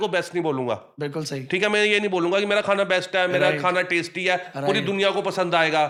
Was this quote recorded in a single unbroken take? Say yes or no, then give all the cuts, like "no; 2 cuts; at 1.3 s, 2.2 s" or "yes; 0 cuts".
yes; 0 cuts